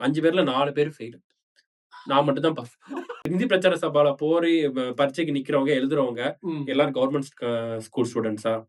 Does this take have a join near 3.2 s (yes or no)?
yes